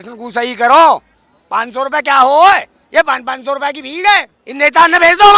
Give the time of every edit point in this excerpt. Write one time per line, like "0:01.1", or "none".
none